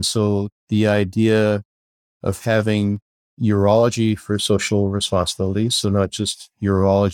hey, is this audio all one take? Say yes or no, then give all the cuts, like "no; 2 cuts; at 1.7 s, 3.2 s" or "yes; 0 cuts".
yes; 0 cuts